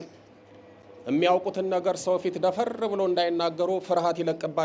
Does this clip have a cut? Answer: no; 0 cuts

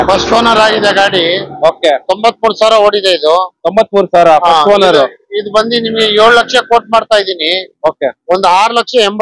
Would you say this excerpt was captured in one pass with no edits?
yes; 0 cuts

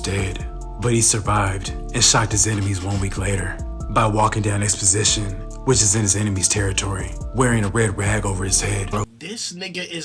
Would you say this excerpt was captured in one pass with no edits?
no; 1 cut; at 9.1 s

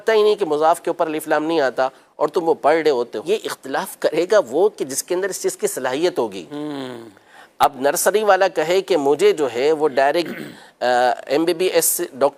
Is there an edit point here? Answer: yes; 1 cut; at 3.2 s

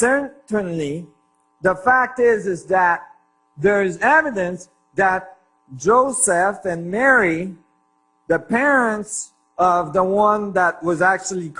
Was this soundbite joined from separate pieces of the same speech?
yes; 1 cut; at 6.9 s

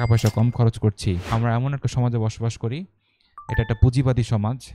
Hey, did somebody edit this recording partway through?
yes; 1 cut; at 1.3 s

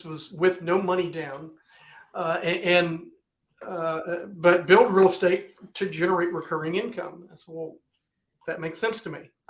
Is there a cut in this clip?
no; 0 cuts

